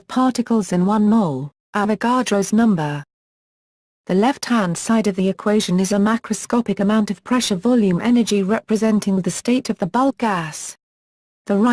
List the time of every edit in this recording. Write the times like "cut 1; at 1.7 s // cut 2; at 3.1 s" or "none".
cut 1; at 8.6 s